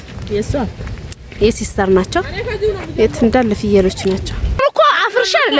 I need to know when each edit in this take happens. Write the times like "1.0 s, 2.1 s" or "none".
4.6 s